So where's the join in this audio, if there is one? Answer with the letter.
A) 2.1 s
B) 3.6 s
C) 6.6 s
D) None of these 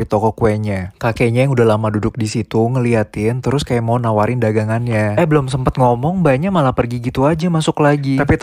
C